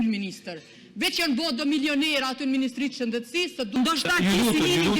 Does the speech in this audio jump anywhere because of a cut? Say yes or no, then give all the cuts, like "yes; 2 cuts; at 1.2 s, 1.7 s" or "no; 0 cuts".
yes; 1 cut; at 3.8 s